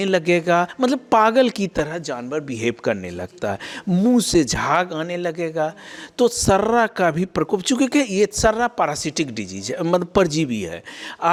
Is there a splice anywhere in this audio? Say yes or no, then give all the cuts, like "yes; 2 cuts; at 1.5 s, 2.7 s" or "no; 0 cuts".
no; 0 cuts